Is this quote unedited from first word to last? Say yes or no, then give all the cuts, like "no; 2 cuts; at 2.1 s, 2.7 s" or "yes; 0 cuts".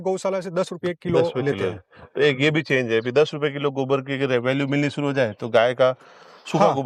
yes; 0 cuts